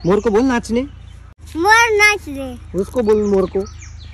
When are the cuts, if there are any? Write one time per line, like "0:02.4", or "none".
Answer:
0:01.4